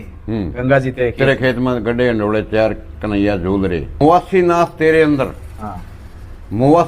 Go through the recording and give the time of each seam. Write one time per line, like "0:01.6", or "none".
0:04.0